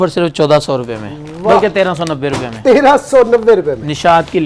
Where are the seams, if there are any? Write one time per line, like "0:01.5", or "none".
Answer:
none